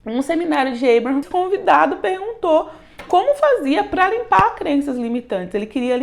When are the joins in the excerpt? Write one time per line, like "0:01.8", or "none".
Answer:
0:01.2